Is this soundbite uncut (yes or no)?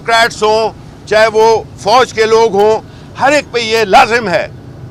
yes